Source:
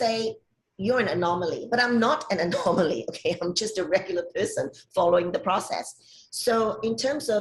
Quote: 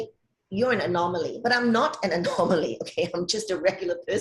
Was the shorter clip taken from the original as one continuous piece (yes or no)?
yes